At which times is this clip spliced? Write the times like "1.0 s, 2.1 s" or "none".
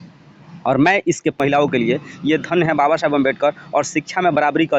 1.4 s